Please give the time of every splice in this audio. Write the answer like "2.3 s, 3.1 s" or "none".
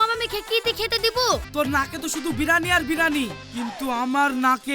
1.5 s